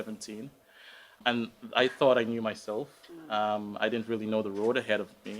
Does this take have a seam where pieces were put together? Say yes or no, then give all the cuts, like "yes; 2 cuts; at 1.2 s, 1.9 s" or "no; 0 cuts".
yes; 1 cut; at 1.2 s